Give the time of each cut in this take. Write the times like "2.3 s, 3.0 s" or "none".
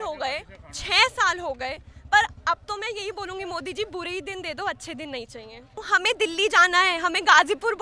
5.8 s